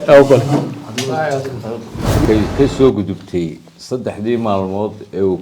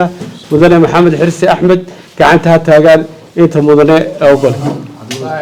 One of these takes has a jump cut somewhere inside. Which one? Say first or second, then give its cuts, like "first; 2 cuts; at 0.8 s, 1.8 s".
first; 1 cut; at 2.2 s